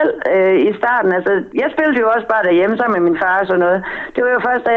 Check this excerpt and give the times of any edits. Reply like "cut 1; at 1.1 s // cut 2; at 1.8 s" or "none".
cut 1; at 1.5 s